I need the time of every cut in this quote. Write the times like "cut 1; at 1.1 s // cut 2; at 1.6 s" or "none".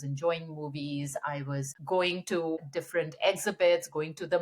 cut 1; at 1.7 s // cut 2; at 2.6 s